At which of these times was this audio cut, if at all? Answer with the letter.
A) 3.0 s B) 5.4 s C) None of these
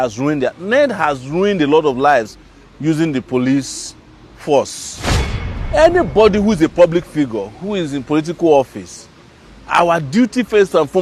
B